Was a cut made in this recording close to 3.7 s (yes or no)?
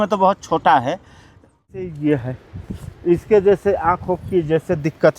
no